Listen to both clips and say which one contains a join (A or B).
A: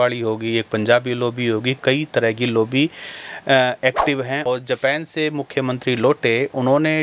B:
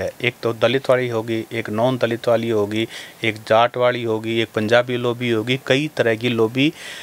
A